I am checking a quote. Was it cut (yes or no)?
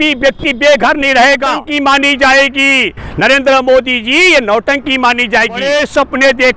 yes